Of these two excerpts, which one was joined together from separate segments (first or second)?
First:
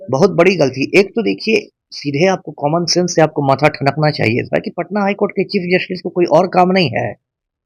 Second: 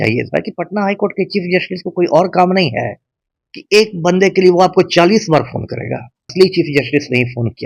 second